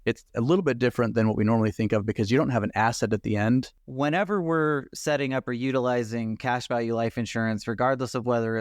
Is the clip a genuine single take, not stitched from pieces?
no; 1 cut; at 3.8 s

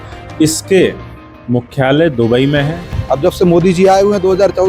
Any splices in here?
yes; 1 cut; at 2.9 s

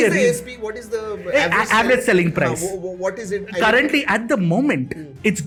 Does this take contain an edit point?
no; 0 cuts

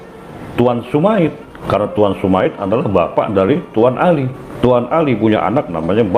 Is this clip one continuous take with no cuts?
no; 2 cuts; at 1.5 s, 4.4 s

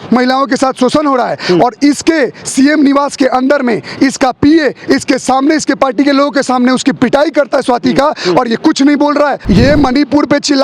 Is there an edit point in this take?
yes; 1 cut; at 9.4 s

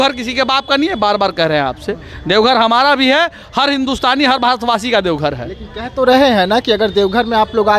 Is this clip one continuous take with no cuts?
yes; 0 cuts

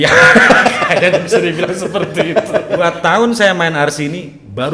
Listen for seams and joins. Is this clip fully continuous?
no; 1 cut; at 2.8 s

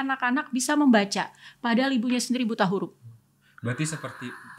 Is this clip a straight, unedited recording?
yes; 0 cuts

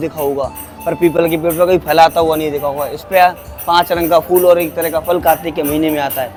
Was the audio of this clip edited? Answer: no; 0 cuts

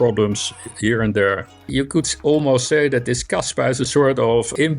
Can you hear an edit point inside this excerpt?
yes; 1 cut; at 1.6 s

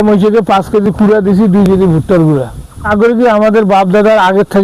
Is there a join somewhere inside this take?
yes; 1 cut; at 2.9 s

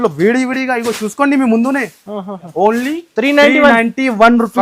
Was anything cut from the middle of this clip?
no; 0 cuts

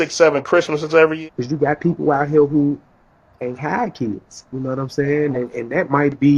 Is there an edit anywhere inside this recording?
yes; 1 cut; at 1.2 s

